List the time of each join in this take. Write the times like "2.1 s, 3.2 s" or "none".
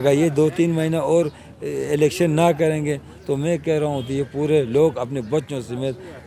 none